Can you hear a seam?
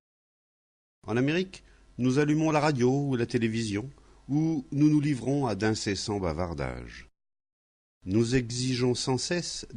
yes; 1 cut; at 4.4 s

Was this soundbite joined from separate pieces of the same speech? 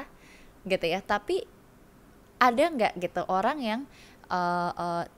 no; 0 cuts

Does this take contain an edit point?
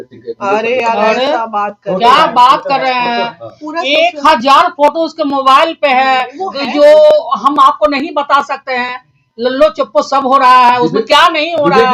no; 0 cuts

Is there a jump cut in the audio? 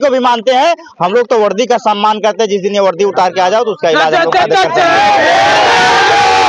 no; 0 cuts

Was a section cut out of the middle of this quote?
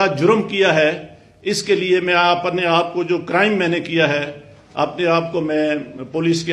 no; 0 cuts

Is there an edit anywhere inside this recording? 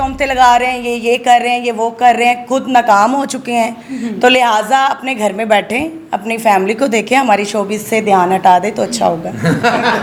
no; 0 cuts

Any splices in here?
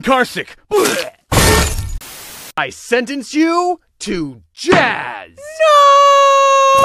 yes; 1 cut; at 1.8 s

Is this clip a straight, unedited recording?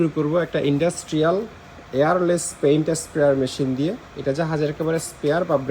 yes; 0 cuts

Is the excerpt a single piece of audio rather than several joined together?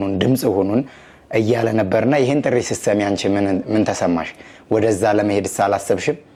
yes; 0 cuts

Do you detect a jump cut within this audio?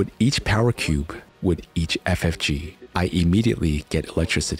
yes; 2 cuts; at 1.2 s, 2.8 s

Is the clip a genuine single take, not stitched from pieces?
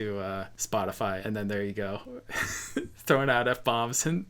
no; 1 cut; at 1.2 s

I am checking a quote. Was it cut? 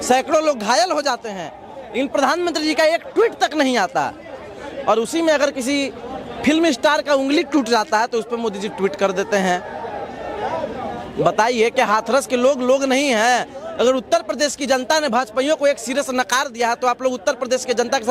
no; 0 cuts

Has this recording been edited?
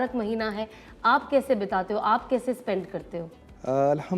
no; 0 cuts

